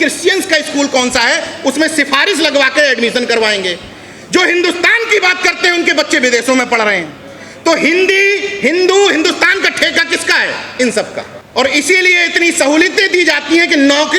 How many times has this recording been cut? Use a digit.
1